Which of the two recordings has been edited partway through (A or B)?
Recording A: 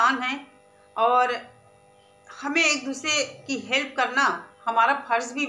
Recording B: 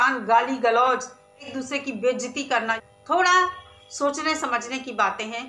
B